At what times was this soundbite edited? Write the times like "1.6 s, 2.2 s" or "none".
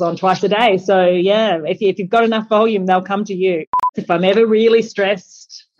4.0 s